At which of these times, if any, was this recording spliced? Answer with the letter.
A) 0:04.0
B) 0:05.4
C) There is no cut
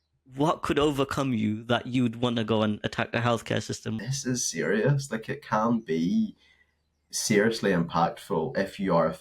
A